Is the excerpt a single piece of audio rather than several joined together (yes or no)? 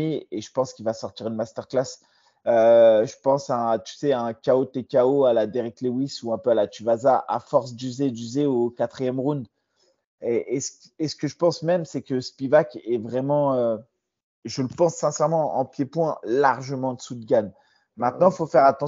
yes